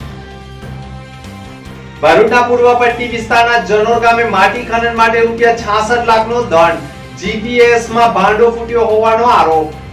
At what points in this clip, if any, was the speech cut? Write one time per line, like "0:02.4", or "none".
0:00.9